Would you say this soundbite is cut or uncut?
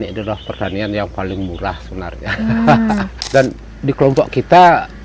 cut